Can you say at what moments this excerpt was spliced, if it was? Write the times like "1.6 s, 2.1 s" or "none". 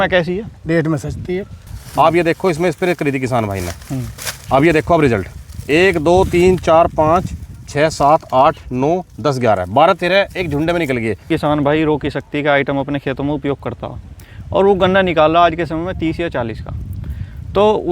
1.6 s, 11.3 s